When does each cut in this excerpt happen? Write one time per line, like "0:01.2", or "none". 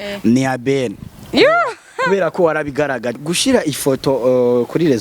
0:03.2